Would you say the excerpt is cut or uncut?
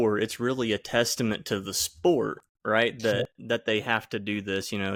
uncut